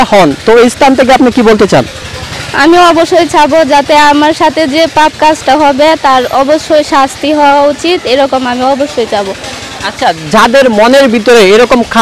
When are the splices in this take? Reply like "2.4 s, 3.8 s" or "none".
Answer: none